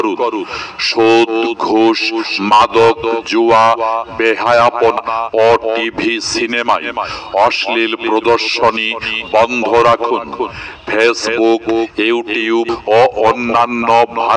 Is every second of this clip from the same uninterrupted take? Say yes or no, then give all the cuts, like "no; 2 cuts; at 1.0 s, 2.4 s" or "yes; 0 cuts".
no; 2 cuts; at 5.0 s, 12.7 s